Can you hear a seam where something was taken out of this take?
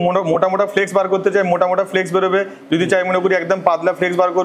no; 0 cuts

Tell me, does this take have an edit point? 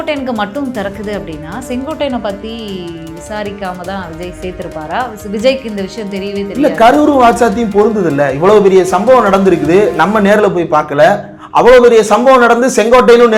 no; 0 cuts

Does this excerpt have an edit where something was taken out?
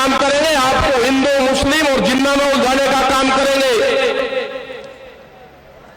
no; 0 cuts

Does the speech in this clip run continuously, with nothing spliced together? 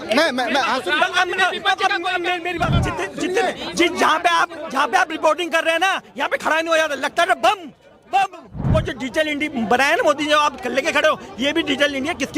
no; 2 cuts; at 2.8 s, 8.6 s

